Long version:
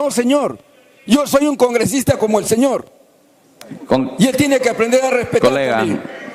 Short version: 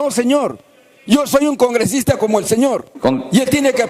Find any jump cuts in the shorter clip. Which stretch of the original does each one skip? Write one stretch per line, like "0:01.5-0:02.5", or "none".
0:02.9-0:03.8